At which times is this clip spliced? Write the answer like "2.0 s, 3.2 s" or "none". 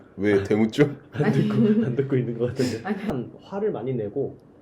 3.1 s